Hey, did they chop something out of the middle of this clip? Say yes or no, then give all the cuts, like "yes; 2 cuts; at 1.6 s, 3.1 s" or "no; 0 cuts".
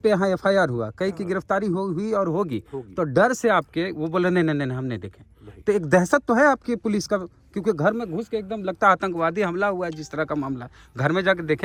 no; 0 cuts